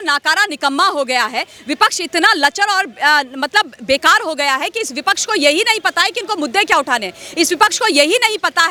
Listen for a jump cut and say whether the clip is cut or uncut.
uncut